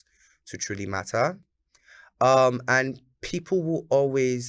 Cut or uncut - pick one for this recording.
uncut